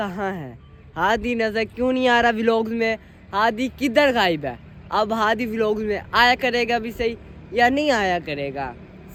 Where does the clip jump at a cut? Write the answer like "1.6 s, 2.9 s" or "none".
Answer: none

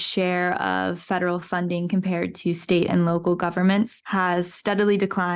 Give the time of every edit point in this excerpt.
4.0 s

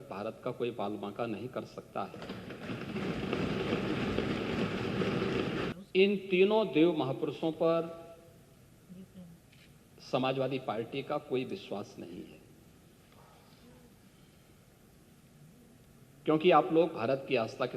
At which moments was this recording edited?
5.7 s

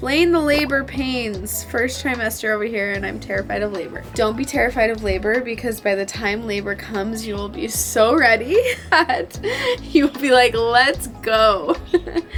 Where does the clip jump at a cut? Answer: none

